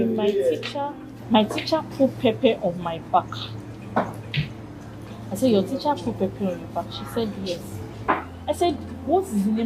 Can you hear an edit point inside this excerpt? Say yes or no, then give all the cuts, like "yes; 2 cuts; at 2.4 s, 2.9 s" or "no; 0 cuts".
yes; 1 cut; at 7.9 s